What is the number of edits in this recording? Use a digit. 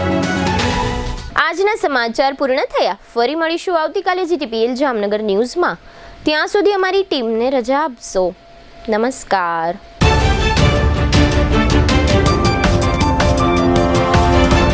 0